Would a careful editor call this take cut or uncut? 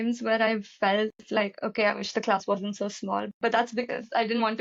uncut